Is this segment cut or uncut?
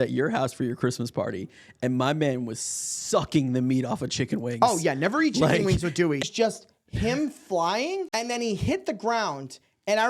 cut